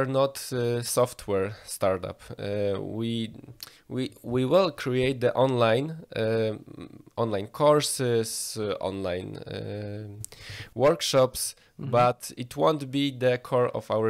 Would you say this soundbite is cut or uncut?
uncut